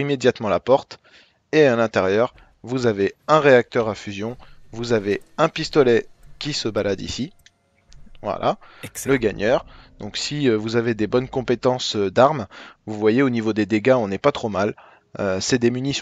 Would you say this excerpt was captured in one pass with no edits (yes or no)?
yes